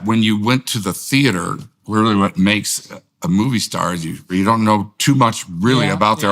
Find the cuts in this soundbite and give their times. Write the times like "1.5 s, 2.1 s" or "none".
4.2 s